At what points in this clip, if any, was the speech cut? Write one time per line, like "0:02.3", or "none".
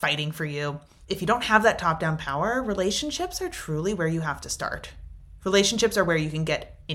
0:00.9